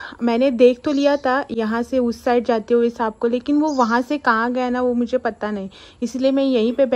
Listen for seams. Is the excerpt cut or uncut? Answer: uncut